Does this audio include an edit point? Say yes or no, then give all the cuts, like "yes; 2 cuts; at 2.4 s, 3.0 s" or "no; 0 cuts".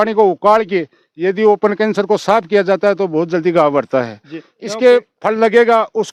no; 0 cuts